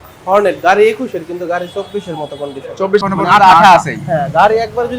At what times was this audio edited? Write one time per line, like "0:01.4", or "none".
0:03.0